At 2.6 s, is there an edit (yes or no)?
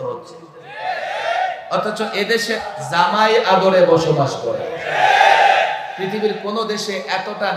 yes